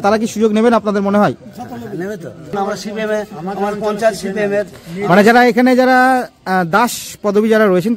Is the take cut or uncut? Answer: cut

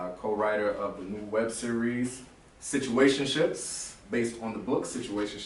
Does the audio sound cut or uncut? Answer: uncut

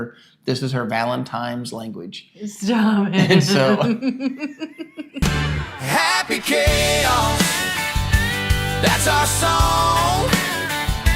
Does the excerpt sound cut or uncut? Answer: cut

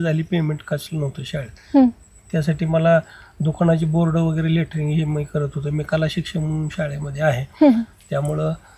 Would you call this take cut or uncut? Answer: uncut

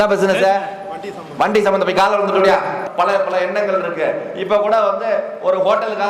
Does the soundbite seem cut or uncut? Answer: cut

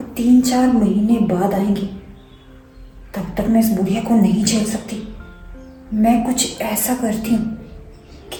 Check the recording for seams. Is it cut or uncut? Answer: uncut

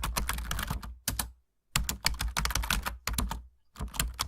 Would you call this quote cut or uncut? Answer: cut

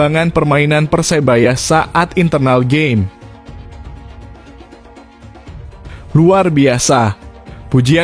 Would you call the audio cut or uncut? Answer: cut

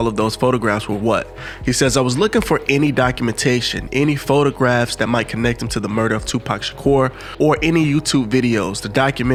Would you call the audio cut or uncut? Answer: uncut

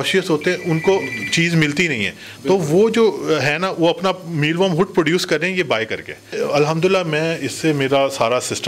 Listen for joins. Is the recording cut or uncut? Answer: cut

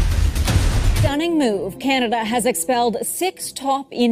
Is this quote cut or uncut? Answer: cut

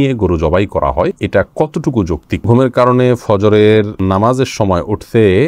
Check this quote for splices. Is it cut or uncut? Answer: cut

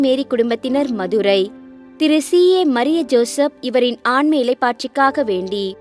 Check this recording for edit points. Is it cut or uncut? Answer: uncut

